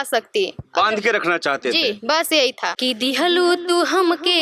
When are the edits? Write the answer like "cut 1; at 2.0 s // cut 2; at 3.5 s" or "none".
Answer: cut 1; at 2.7 s